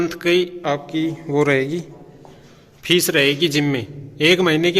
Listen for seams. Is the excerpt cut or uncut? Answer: uncut